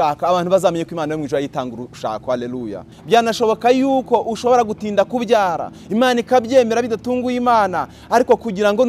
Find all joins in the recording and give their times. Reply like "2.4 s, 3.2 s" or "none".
2.9 s